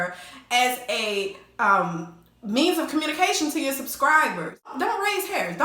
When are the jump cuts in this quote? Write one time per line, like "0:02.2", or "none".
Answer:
0:04.7